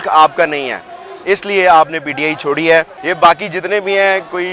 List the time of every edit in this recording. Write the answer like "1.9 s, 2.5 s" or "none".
3.0 s